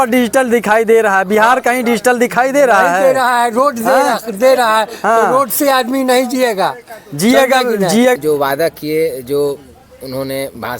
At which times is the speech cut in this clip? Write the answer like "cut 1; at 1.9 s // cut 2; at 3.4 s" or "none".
cut 1; at 8.2 s